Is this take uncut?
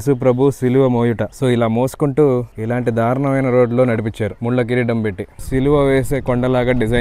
no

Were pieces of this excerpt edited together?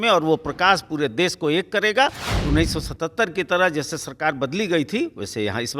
yes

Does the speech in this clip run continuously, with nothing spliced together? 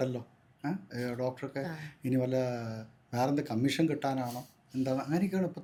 yes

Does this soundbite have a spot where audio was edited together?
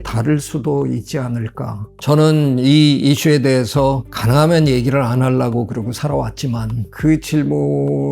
yes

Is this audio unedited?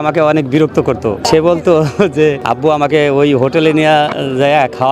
no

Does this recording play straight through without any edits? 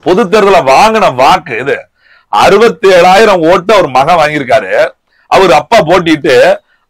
yes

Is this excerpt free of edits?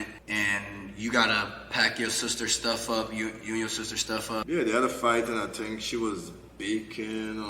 no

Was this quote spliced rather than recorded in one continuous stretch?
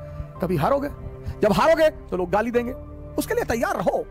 no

